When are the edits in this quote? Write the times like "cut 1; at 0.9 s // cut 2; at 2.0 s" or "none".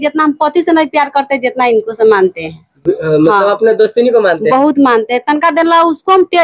none

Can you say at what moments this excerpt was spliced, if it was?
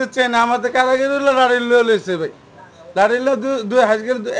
none

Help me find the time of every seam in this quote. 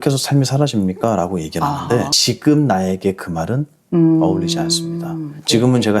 cut 1; at 2.1 s

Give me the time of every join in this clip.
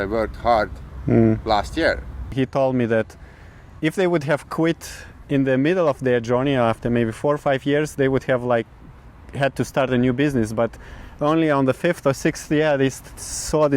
cut 1; at 2.3 s

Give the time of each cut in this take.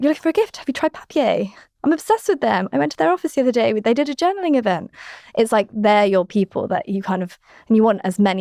none

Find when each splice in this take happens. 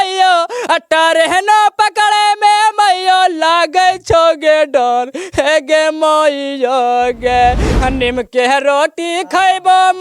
cut 1; at 7.7 s

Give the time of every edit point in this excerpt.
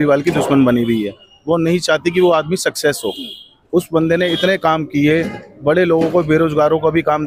none

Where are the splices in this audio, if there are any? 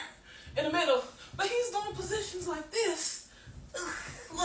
none

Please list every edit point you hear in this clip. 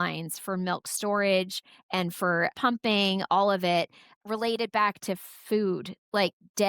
cut 1; at 2.5 s // cut 2; at 4.2 s

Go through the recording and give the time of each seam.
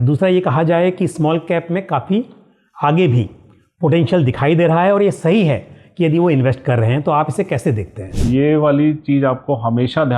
cut 1; at 8.2 s

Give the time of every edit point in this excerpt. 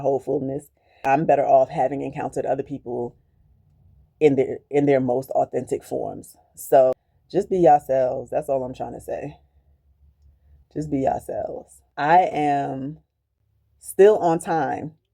none

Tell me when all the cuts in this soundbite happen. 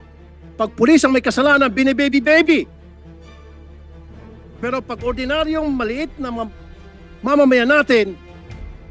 none

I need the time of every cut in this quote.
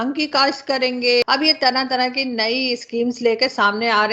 cut 1; at 1.2 s

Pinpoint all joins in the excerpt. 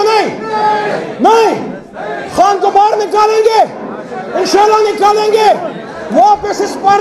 none

